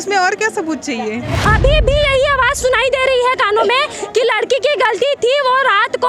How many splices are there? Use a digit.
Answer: 1